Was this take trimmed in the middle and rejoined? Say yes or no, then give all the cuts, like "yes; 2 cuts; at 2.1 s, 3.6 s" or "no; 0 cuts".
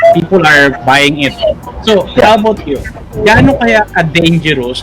no; 0 cuts